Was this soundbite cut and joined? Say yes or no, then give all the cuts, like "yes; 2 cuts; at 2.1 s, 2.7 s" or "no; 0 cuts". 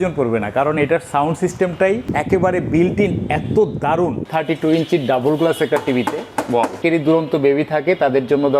yes; 3 cuts; at 2.1 s, 4.3 s, 6.7 s